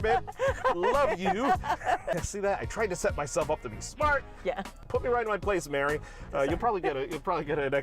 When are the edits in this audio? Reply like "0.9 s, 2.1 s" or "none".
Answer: 2.1 s, 4.8 s